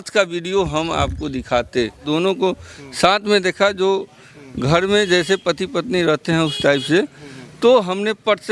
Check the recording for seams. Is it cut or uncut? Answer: cut